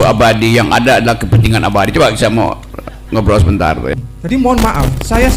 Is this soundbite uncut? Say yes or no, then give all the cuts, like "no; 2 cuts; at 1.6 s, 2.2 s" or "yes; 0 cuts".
no; 1 cut; at 3.9 s